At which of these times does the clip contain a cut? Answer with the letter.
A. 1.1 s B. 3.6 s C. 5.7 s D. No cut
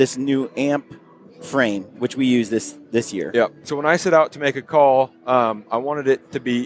B